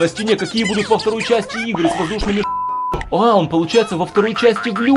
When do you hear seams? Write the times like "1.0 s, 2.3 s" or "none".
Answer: 2.5 s